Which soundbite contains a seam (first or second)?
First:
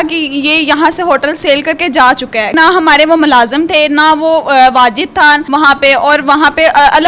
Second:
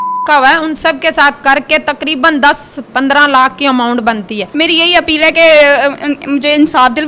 second